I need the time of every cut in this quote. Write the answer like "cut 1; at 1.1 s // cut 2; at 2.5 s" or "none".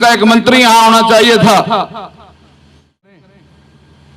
cut 1; at 3.2 s

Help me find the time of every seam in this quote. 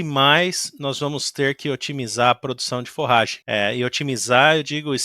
cut 1; at 3.4 s

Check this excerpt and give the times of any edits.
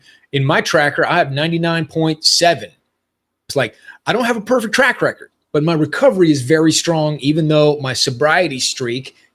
cut 1; at 3.5 s // cut 2; at 4.9 s

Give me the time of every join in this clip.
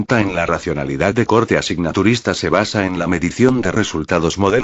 cut 1; at 1.0 s

